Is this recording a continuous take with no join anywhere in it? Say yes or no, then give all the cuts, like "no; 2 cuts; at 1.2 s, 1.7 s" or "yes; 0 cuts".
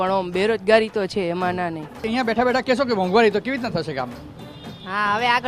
no; 1 cut; at 2.0 s